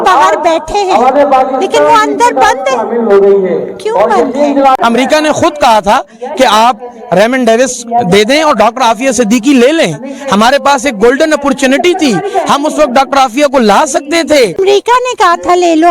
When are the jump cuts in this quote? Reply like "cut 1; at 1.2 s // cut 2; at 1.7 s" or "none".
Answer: cut 1; at 4.8 s // cut 2; at 14.6 s